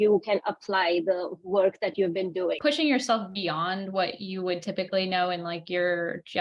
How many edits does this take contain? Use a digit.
1